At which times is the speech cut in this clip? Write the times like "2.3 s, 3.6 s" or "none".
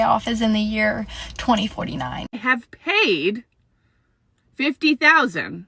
2.1 s